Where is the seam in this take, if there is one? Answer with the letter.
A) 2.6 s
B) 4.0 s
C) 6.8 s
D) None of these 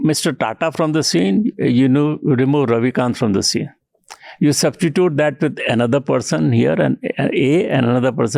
D